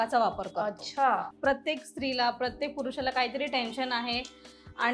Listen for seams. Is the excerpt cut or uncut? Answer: cut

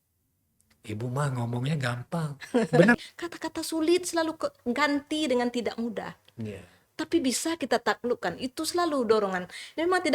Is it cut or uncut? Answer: cut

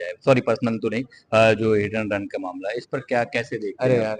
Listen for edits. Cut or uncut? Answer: uncut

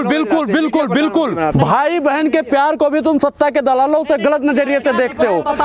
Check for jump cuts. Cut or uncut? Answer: cut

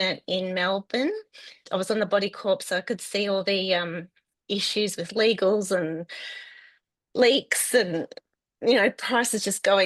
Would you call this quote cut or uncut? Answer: cut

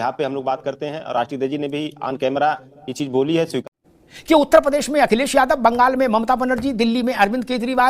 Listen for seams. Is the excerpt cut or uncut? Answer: cut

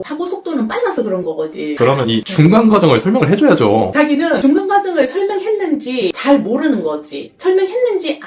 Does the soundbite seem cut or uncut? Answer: cut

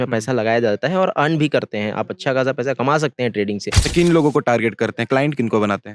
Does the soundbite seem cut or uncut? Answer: cut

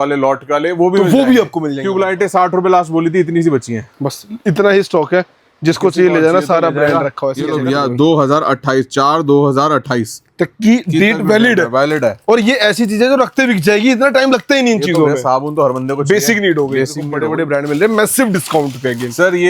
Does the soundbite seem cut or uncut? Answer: cut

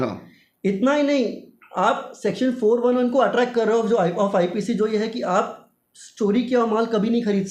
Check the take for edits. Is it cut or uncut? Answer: uncut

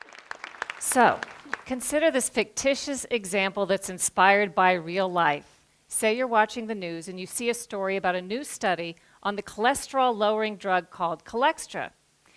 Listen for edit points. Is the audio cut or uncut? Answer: uncut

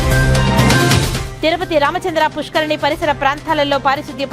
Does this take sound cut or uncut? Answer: cut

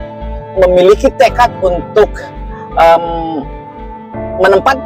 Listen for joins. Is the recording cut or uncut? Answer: uncut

